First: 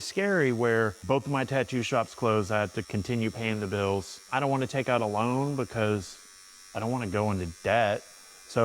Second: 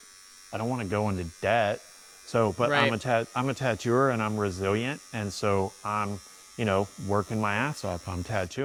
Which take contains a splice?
first; 2 cuts; at 1.0 s, 4.2 s

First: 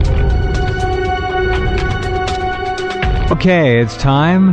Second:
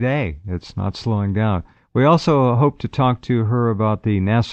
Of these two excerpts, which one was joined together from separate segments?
second; 1 cut; at 1.2 s

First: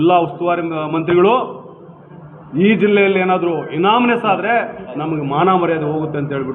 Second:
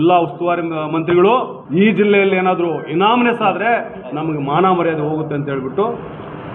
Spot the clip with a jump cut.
second; 1 cut; at 1.6 s

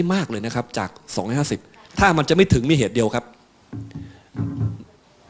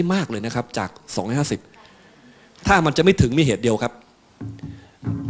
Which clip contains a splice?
first; 1 cut; at 1.8 s

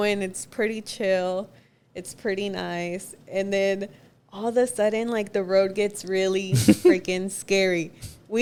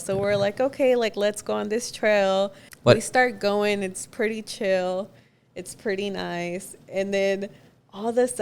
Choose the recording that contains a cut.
second; 1 cut; at 2.6 s

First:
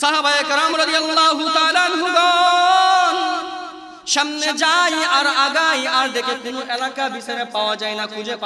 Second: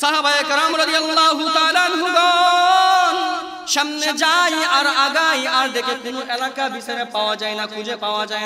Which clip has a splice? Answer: second; 1 cut; at 3.6 s

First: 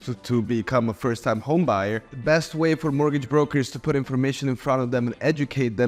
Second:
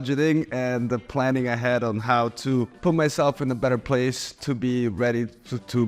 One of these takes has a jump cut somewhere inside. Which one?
first; 1 cut; at 2.1 s

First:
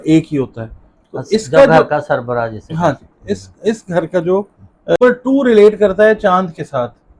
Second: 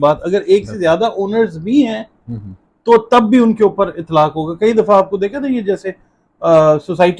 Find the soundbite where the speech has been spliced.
first; 1 cut; at 5.0 s

